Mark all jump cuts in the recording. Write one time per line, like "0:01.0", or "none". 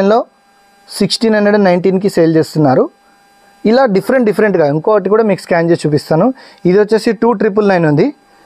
none